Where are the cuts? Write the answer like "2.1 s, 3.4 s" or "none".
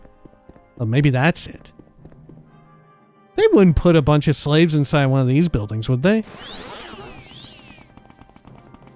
none